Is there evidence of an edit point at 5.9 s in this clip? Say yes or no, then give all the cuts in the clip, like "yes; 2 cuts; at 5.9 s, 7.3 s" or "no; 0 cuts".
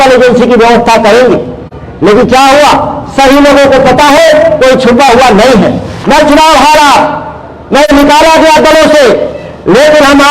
yes; 1 cut; at 5.9 s